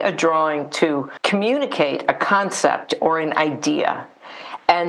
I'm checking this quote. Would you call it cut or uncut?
cut